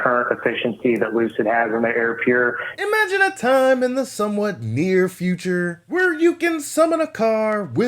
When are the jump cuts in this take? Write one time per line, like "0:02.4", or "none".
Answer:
0:02.7